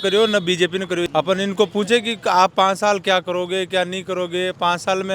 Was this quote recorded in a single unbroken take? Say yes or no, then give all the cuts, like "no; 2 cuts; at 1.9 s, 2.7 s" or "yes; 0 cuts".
no; 1 cut; at 1.0 s